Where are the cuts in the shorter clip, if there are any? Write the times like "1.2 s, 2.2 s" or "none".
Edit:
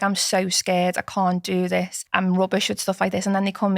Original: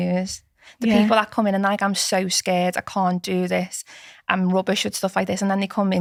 2.0 s